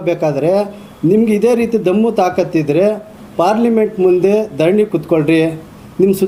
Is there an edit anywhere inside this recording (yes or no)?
no